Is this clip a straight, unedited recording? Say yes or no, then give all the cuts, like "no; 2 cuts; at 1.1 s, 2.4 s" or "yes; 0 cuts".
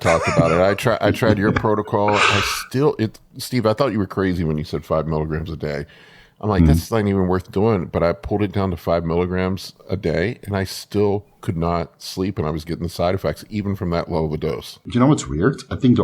no; 1 cut; at 14.8 s